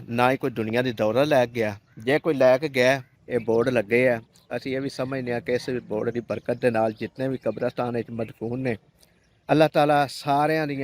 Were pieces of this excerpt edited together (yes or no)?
yes